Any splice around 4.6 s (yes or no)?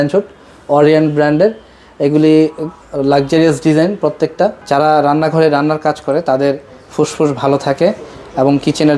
yes